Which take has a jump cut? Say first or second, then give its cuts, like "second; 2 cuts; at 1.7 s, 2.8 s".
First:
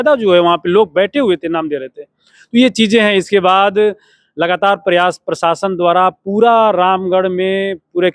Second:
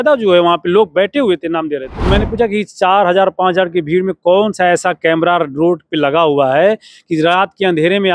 second; 1 cut; at 1.9 s